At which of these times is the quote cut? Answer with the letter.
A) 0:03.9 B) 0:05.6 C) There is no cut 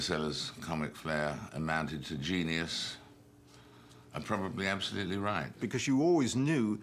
B